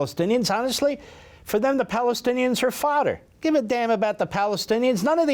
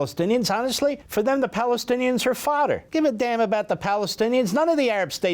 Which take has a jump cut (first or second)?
second